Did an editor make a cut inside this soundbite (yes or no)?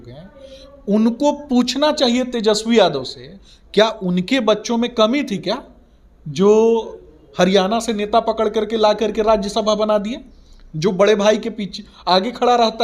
no